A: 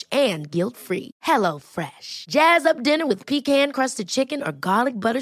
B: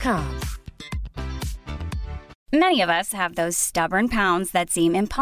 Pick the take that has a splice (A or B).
B